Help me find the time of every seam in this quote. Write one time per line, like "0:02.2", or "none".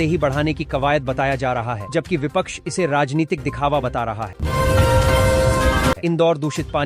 0:04.3
0:06.0